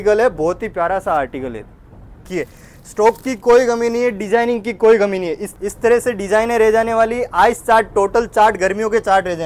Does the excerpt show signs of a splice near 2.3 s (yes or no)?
yes